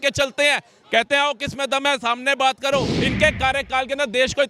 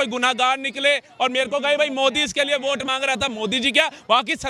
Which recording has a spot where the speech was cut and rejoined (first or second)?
first